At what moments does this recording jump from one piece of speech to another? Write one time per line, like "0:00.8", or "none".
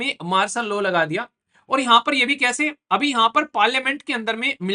none